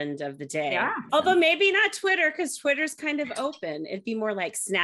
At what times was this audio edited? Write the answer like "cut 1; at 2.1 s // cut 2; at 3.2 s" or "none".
cut 1; at 1.0 s